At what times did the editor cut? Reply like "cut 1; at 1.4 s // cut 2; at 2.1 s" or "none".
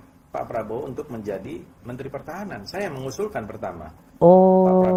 none

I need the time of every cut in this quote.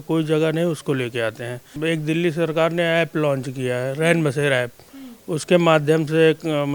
cut 1; at 1.7 s

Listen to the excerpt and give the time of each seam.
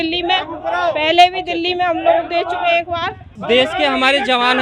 cut 1; at 3.3 s

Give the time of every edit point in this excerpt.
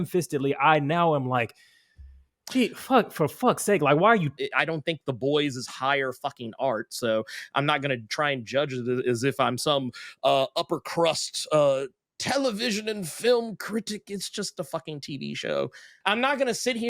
cut 1; at 4.4 s // cut 2; at 16.0 s

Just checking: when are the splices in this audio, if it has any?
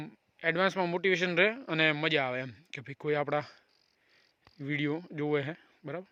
none

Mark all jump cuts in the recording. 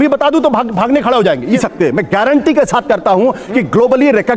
cut 1; at 1.6 s

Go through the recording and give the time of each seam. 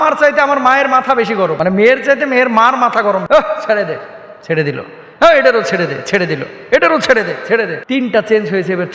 cut 1; at 1.6 s // cut 2; at 3.2 s // cut 3; at 7.8 s

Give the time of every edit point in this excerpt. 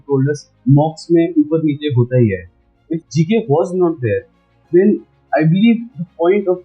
cut 1; at 2.8 s

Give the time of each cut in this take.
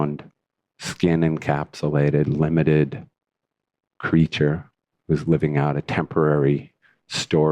cut 1; at 5.9 s

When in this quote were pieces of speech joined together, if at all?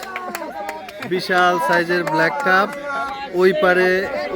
none

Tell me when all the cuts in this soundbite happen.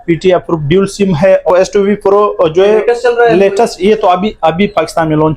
cut 1; at 1.5 s

